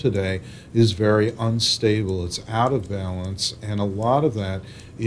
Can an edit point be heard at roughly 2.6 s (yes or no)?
no